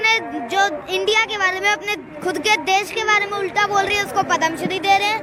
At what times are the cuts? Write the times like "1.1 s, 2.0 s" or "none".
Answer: none